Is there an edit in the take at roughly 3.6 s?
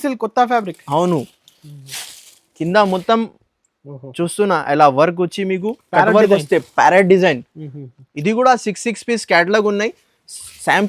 no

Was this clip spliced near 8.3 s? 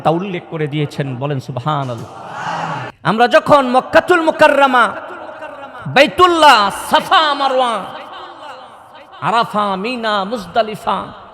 no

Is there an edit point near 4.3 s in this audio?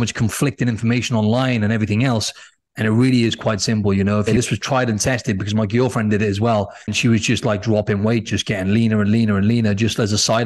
yes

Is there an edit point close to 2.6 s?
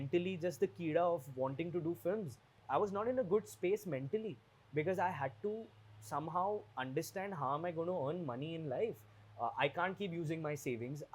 yes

